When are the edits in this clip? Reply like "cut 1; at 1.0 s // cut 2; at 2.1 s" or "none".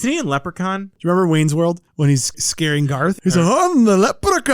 cut 1; at 0.9 s // cut 2; at 2.7 s